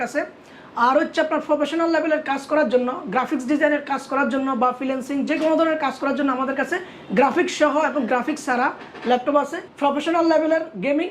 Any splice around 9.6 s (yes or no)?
yes